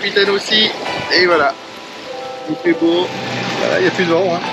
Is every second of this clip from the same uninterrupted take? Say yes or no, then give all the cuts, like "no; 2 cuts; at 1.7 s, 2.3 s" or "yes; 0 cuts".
no; 1 cut; at 3.2 s